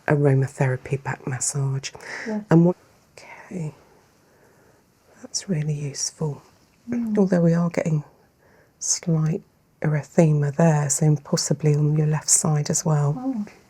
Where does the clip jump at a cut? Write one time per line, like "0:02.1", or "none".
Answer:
0:02.7